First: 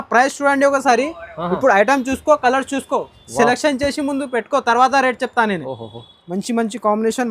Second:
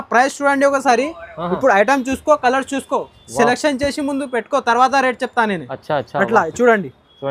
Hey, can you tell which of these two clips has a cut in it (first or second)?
first